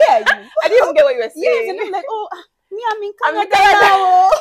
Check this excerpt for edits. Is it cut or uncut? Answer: uncut